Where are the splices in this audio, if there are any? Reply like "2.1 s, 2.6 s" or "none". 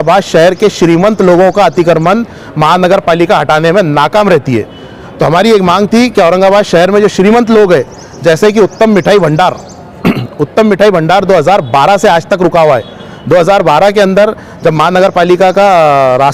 none